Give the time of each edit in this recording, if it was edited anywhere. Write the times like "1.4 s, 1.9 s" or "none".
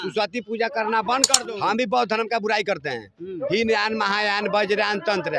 1.3 s